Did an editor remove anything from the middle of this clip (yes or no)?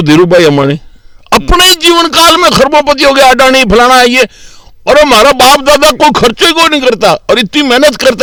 no